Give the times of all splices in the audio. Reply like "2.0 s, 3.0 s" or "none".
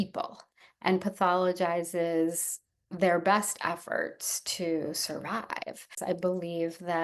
6.0 s